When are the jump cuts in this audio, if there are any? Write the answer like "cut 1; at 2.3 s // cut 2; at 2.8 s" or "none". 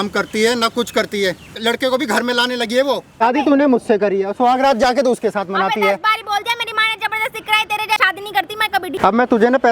cut 1; at 1.6 s // cut 2; at 3.2 s // cut 3; at 8.3 s